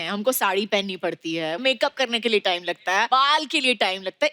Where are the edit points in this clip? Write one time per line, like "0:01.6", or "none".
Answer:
0:01.6
0:03.1